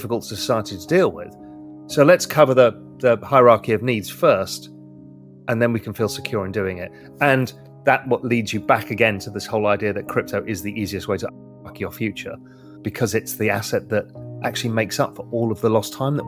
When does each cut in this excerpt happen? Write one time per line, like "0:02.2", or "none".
0:12.8